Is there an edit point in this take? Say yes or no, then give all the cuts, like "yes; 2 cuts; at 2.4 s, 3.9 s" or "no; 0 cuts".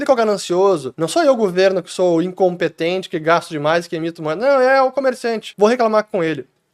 yes; 2 cuts; at 0.9 s, 5.4 s